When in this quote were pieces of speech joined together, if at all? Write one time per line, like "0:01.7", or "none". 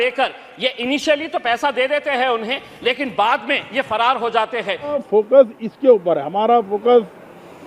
0:05.0